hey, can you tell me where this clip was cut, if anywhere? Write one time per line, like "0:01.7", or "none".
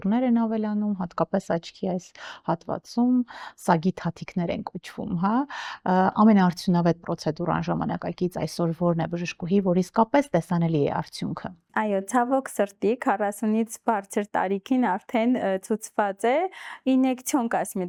none